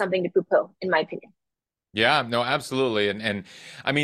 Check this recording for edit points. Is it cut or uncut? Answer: uncut